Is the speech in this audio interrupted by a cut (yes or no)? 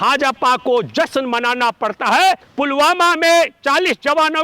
yes